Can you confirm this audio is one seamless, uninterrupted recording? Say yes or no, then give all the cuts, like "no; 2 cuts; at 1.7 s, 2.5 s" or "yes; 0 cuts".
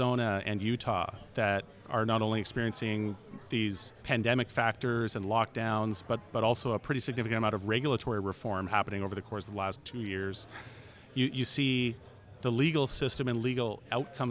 yes; 0 cuts